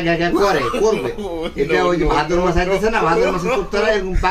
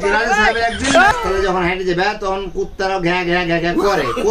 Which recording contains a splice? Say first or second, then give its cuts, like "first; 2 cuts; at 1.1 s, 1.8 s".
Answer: second; 1 cut; at 1.1 s